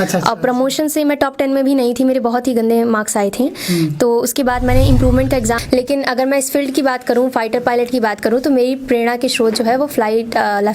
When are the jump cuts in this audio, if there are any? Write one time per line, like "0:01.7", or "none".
0:05.6